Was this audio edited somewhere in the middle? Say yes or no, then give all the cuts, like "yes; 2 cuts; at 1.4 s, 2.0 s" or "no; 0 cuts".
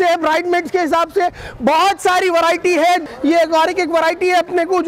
yes; 1 cut; at 3.0 s